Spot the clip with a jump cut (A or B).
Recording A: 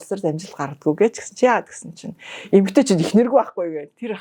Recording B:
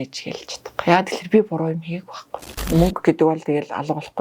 B